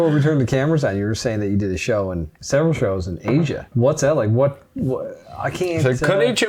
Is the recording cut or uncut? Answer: cut